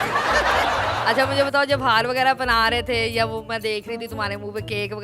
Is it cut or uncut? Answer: cut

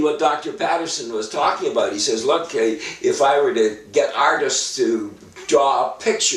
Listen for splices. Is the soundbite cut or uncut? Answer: uncut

